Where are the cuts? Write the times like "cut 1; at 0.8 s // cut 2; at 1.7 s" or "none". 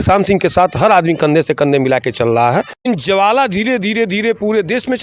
cut 1; at 2.8 s